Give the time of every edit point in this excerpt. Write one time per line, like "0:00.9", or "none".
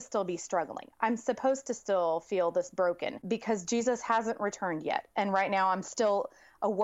0:03.2